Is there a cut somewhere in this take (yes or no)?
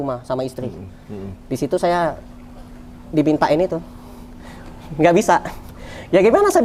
no